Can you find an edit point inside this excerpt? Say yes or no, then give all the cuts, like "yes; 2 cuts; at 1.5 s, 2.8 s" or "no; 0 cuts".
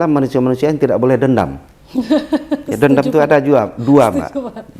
no; 0 cuts